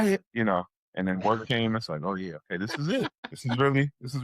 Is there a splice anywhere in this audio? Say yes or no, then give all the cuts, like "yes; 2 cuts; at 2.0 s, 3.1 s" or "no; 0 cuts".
yes; 1 cut; at 3.3 s